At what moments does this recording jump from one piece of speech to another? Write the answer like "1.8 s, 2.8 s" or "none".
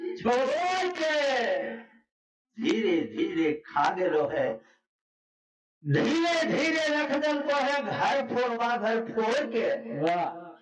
none